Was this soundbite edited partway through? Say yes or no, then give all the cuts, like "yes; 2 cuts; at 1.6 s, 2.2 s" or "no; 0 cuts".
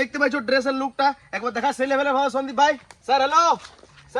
yes; 1 cut; at 2.9 s